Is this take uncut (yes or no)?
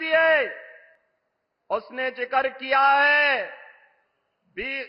yes